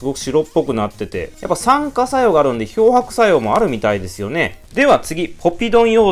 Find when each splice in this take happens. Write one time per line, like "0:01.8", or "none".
none